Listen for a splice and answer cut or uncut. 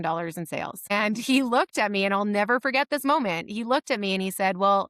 cut